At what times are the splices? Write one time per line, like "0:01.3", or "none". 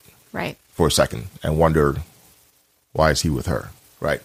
none